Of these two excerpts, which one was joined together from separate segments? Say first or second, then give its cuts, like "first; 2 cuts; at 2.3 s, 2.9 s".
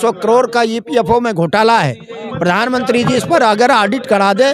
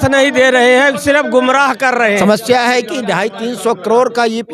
second; 1 cut; at 2.2 s